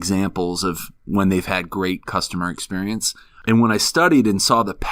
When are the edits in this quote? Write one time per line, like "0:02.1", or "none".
0:03.3